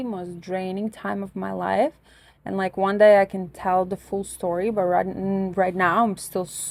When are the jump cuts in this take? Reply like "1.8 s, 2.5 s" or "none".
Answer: none